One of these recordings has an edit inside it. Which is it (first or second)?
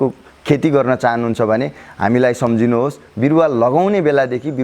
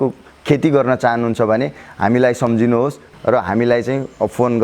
second